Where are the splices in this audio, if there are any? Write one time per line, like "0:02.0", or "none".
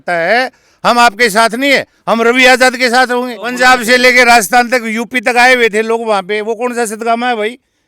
0:03.4